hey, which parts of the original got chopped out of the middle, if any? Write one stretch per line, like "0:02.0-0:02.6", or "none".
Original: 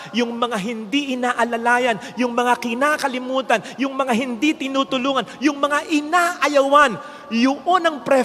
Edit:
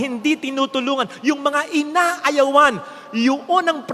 none